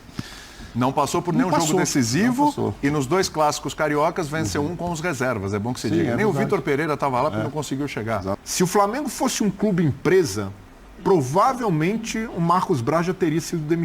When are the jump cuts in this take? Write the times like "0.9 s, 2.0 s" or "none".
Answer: 8.4 s